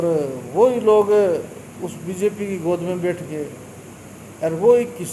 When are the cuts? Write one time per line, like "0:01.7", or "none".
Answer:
none